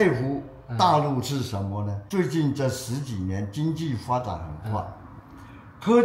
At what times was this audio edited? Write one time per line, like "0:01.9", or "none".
0:02.0